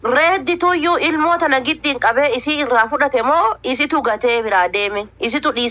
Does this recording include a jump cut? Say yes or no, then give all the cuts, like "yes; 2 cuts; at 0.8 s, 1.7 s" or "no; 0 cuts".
no; 0 cuts